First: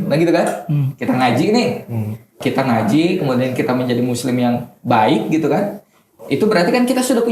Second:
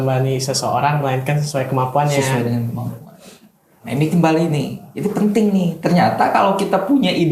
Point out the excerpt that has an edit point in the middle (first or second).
first